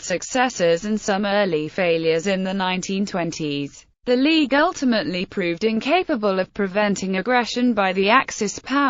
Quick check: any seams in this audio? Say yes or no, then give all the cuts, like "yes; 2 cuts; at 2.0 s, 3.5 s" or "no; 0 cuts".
yes; 1 cut; at 7.7 s